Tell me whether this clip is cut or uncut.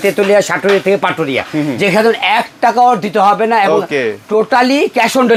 uncut